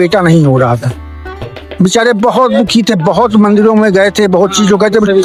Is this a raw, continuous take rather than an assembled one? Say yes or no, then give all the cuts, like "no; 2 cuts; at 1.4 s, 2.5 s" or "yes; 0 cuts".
yes; 0 cuts